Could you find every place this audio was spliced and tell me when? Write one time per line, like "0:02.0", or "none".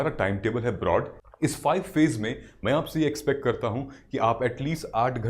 0:01.2

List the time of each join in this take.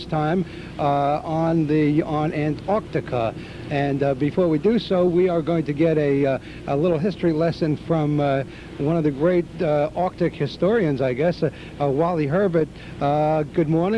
0:02.6

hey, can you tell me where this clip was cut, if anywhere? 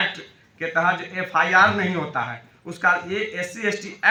none

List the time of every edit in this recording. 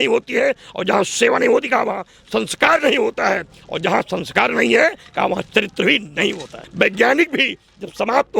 0:06.6

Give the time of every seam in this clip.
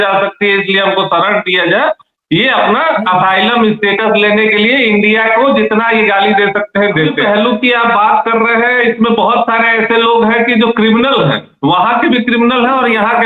0:07.2

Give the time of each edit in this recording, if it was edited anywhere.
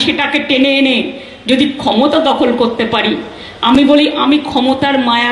none

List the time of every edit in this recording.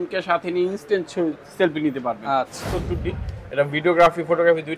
0:02.6

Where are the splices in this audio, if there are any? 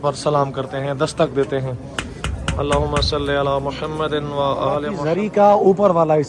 0:04.9

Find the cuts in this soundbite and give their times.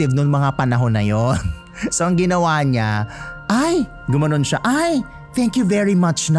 none

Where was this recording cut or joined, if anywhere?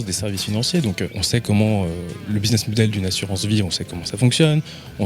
0:01.2
0:02.1

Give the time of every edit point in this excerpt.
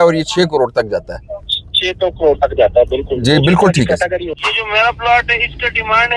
0:04.4

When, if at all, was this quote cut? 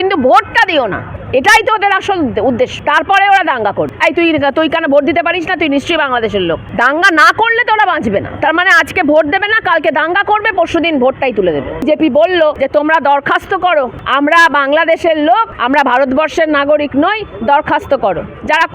0:01.1
0:02.8
0:03.9
0:06.7
0:11.8
0:12.6
0:14.0
0:15.5

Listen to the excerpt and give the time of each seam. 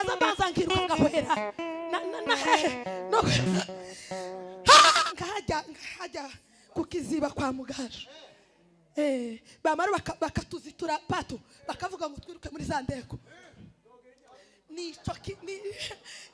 0:05.0

